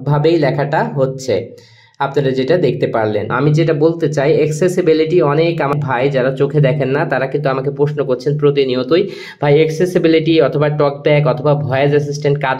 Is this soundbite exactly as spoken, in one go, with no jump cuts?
no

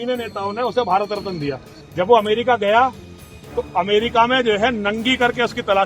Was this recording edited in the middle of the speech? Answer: yes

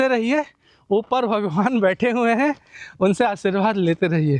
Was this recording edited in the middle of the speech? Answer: no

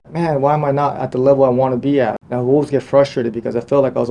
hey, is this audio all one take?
no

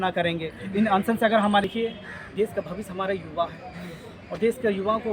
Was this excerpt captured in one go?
no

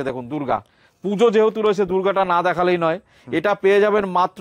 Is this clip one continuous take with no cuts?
yes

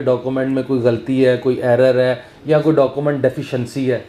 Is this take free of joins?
yes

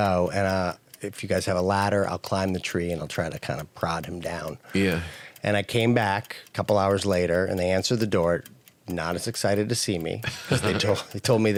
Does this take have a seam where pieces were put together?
no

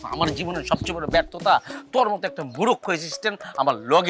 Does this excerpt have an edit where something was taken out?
no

